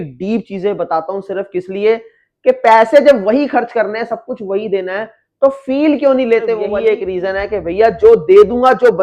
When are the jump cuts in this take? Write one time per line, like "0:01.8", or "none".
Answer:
0:06.7